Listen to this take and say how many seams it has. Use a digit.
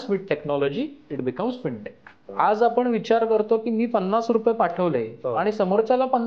1